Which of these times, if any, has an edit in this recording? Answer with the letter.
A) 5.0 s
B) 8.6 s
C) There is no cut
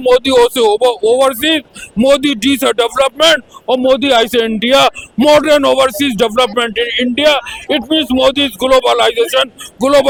C